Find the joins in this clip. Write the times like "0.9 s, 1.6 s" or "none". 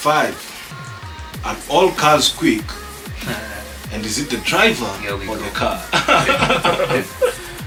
none